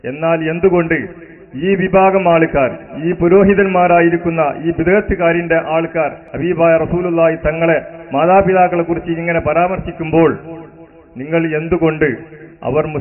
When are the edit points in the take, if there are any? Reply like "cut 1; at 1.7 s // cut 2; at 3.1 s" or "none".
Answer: cut 1; at 6.2 s